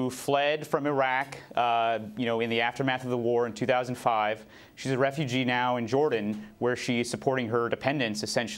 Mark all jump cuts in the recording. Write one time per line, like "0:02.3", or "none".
0:04.2